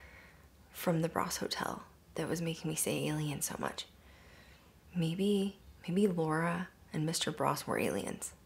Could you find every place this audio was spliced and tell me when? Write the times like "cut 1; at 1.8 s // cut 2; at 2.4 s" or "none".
none